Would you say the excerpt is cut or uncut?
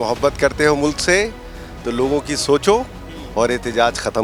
uncut